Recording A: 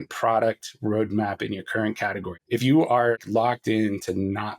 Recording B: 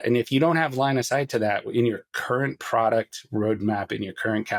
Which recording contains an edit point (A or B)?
A